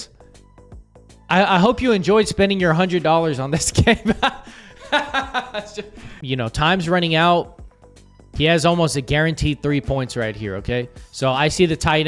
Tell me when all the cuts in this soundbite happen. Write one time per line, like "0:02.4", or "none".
0:06.2